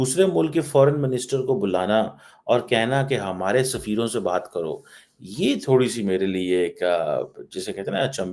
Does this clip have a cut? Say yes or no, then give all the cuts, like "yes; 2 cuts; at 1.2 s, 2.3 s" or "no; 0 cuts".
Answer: no; 0 cuts